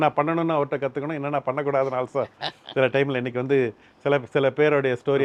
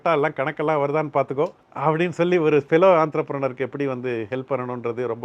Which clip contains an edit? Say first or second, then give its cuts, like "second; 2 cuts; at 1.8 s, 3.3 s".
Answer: second; 1 cut; at 1.6 s